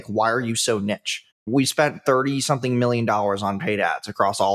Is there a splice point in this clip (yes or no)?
yes